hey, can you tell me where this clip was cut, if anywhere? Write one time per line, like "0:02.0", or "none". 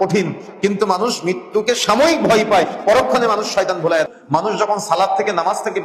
0:04.1